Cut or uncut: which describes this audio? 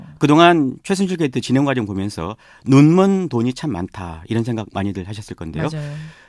uncut